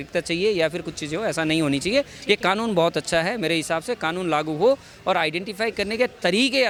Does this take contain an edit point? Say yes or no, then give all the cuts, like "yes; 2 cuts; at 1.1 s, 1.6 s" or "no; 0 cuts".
no; 0 cuts